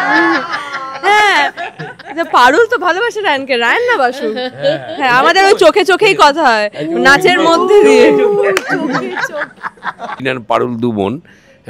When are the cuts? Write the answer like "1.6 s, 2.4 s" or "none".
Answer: 10.2 s